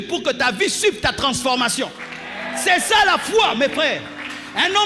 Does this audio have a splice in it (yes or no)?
no